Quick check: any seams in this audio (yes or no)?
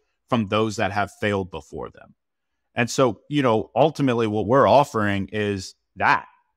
no